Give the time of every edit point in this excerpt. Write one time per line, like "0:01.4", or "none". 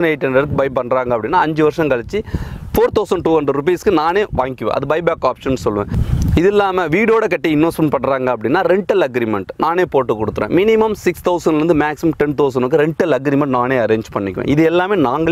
none